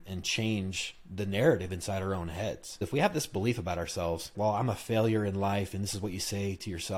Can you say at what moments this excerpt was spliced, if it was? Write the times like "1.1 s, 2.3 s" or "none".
2.9 s, 4.3 s